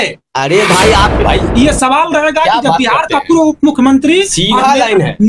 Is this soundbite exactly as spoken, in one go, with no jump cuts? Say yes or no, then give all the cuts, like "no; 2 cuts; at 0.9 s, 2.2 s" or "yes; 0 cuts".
no; 1 cut; at 1.2 s